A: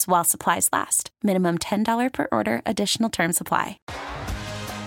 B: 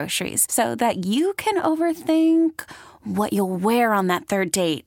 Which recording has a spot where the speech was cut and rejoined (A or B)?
A